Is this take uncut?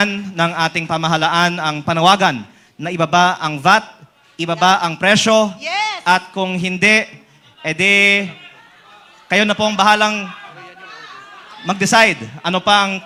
yes; 0 cuts

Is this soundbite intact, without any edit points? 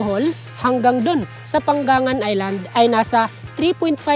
yes; 0 cuts

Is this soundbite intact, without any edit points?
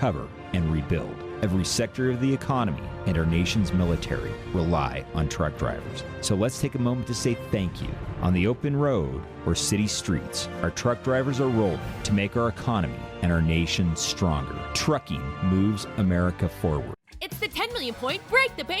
no; 1 cut; at 16.9 s

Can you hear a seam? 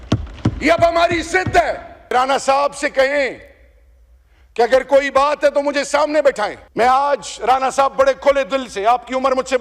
yes; 2 cuts; at 2.1 s, 6.6 s

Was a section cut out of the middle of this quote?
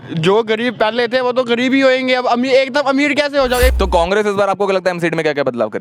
yes; 1 cut; at 3.7 s

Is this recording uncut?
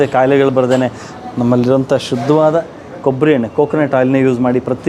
no; 1 cut; at 1.0 s

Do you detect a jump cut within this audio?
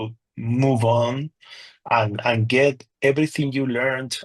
no; 0 cuts

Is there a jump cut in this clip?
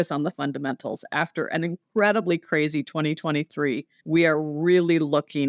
yes; 2 cuts; at 1.8 s, 3.9 s

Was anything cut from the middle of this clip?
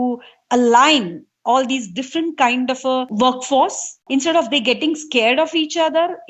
yes; 2 cuts; at 3.1 s, 4.0 s

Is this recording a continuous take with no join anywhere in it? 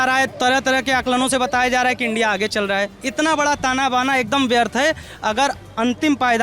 no; 1 cut; at 3.0 s

